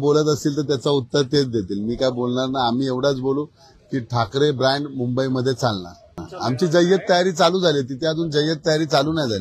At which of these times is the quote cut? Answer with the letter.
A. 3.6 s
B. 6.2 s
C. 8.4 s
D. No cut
B